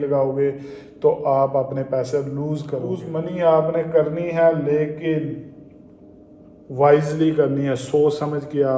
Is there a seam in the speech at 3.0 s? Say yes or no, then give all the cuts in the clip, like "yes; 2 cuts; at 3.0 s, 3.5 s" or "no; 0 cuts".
yes; 1 cut; at 3.0 s